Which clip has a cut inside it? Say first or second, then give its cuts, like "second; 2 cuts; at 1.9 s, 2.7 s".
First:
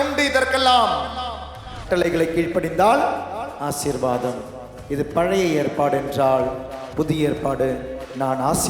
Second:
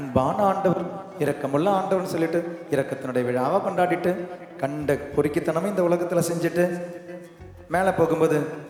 first; 1 cut; at 1.8 s